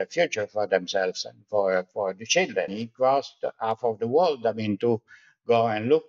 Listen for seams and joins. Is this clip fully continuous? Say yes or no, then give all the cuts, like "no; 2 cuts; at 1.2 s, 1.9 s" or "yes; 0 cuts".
no; 1 cut; at 2.8 s